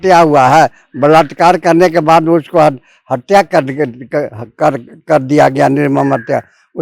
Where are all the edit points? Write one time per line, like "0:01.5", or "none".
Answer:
none